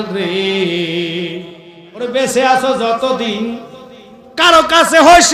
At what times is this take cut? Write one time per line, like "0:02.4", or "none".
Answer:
0:02.1